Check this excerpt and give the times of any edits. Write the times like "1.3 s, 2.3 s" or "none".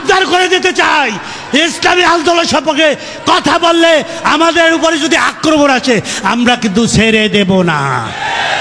none

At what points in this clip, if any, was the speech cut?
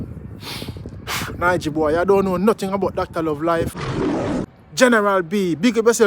4.3 s

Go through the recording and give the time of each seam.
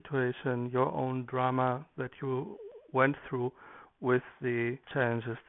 none

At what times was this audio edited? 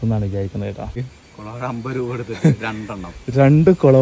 1.2 s

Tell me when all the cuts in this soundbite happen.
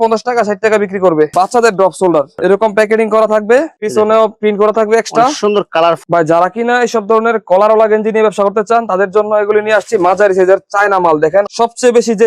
1.3 s, 6.0 s, 11.5 s

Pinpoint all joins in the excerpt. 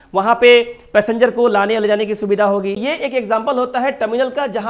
2.8 s

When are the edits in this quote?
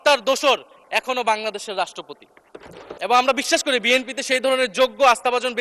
2.9 s

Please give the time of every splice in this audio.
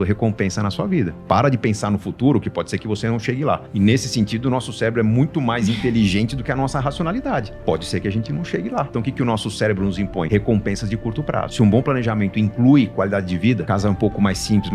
3.7 s, 8.9 s, 10.3 s, 11.5 s, 13.7 s

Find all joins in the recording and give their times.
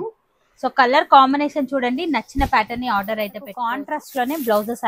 3.7 s

